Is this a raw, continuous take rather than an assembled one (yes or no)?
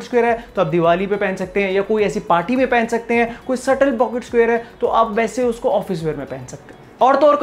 yes